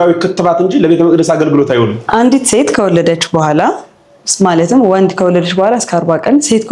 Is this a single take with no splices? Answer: no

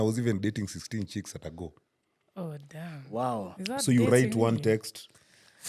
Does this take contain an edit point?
no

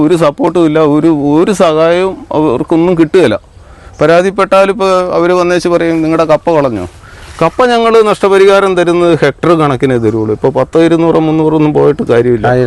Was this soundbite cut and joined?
no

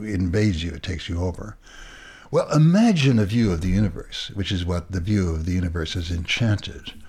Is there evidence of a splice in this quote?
no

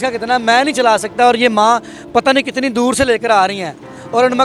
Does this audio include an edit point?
no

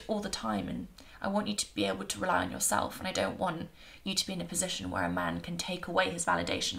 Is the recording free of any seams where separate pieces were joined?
yes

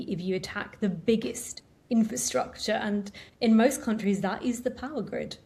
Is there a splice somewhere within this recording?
no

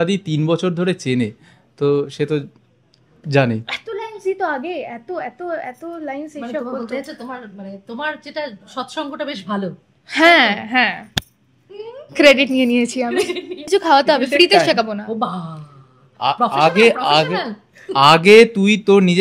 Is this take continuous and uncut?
no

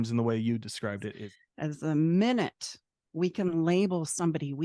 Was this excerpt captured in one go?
no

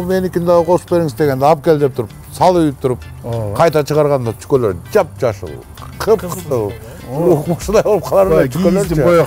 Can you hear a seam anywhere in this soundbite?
no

